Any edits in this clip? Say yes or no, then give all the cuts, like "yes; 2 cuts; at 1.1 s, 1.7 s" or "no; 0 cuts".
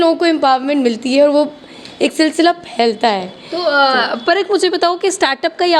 no; 0 cuts